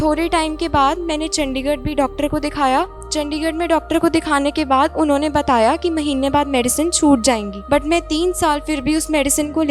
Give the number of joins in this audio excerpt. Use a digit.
2